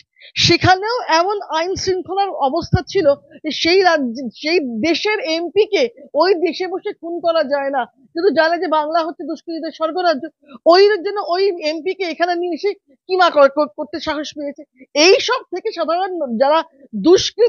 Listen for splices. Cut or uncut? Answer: uncut